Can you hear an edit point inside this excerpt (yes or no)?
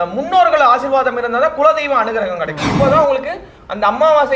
yes